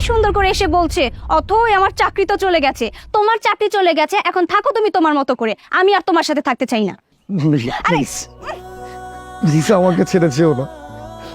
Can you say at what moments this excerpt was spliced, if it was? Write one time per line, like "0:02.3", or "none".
0:06.9